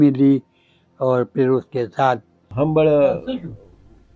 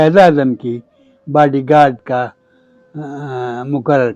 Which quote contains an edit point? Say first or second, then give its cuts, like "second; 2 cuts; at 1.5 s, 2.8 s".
first; 1 cut; at 2.4 s